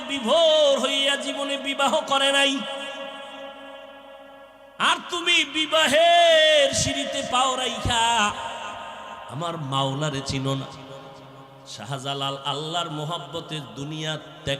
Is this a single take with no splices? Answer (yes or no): yes